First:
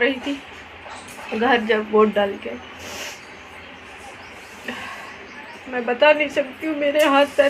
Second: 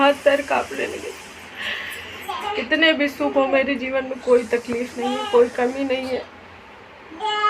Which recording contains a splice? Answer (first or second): second